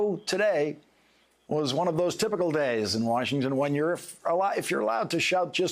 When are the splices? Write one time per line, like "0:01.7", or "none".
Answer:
0:01.9